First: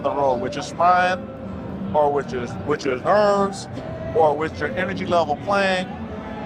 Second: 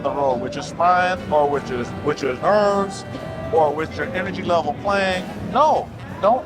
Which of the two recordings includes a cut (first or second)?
second